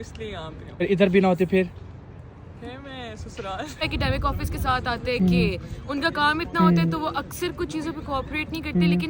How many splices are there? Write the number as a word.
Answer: one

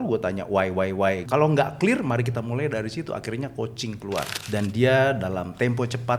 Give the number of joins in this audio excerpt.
two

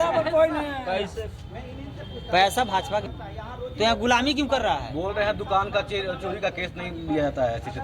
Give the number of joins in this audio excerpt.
one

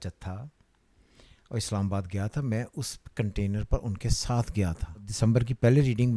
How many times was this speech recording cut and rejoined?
one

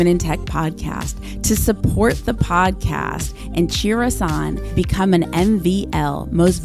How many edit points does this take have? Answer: zero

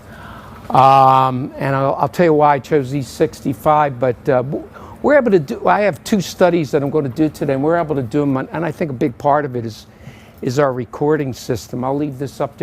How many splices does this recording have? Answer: one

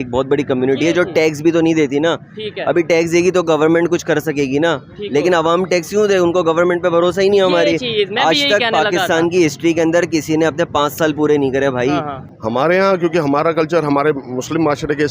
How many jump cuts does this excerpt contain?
one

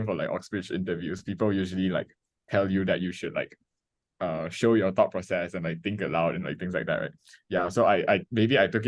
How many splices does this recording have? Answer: zero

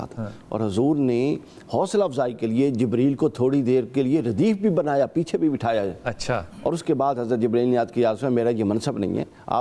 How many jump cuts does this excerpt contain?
zero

